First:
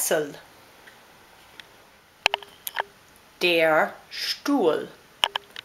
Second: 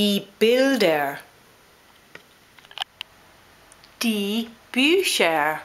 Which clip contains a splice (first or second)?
first